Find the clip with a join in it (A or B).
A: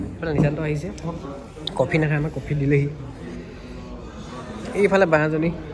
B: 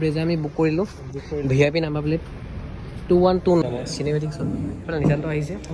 B